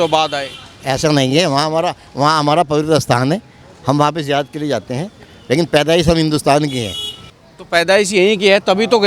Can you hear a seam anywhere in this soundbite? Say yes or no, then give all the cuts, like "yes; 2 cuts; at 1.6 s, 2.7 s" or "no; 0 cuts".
no; 0 cuts